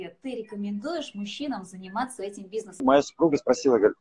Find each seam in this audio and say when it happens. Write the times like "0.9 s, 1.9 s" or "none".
2.8 s